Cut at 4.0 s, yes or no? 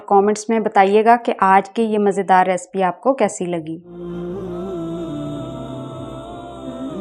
yes